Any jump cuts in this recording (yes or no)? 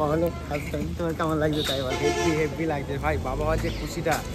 no